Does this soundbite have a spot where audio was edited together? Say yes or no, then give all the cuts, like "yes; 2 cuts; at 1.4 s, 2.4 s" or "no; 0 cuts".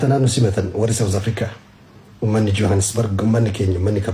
no; 0 cuts